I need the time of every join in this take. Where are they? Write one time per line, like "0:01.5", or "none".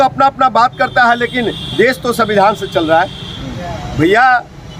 none